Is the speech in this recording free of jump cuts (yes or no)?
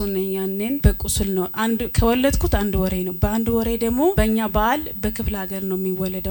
no